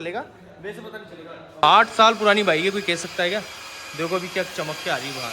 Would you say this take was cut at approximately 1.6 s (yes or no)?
yes